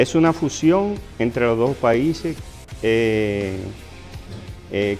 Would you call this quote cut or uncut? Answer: uncut